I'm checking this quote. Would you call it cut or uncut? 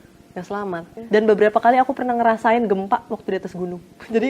cut